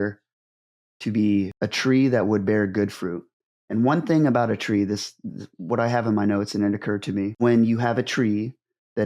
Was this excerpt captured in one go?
no; 1 cut; at 1.5 s

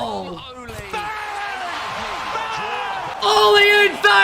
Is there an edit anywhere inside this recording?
yes; 1 cut; at 3.1 s

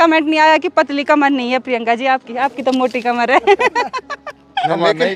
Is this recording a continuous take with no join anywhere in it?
yes; 0 cuts

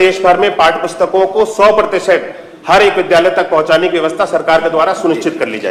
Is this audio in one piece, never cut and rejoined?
yes; 0 cuts

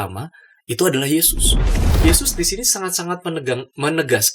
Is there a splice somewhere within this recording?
yes; 1 cut; at 1.8 s

